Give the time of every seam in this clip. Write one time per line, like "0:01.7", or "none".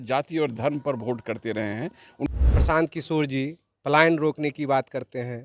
0:02.3